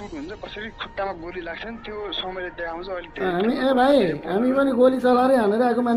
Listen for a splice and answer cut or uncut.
uncut